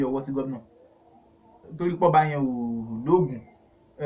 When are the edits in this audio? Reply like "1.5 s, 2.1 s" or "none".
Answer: 1.7 s